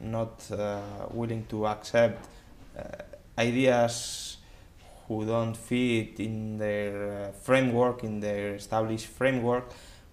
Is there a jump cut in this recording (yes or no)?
yes